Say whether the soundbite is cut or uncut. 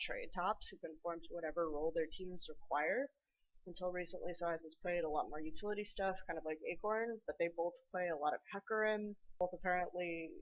uncut